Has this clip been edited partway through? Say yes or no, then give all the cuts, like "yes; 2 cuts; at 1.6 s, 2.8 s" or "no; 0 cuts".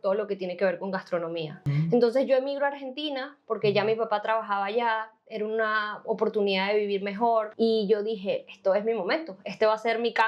yes; 2 cuts; at 1.7 s, 7.5 s